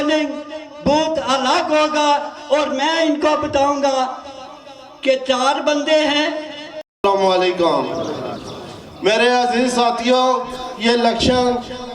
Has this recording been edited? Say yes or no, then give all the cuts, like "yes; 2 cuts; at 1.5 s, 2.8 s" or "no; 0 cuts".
no; 0 cuts